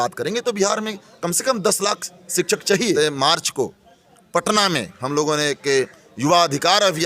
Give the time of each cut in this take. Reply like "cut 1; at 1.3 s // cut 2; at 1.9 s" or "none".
cut 1; at 2.9 s